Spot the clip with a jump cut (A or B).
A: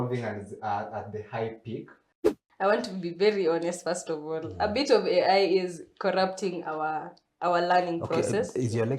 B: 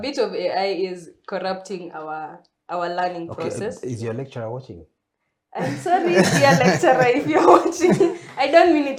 A